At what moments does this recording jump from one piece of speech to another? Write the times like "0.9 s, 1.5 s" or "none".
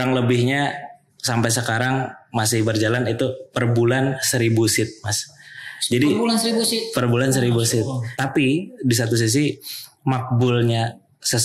8.0 s